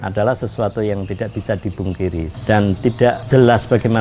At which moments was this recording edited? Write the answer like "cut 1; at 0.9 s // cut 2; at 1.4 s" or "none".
cut 1; at 2.3 s // cut 2; at 3.2 s